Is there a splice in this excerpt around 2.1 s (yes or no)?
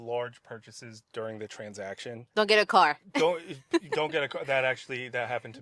yes